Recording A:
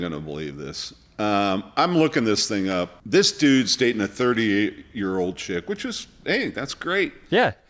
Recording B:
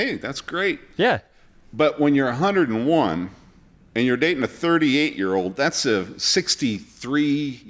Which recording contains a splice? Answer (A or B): A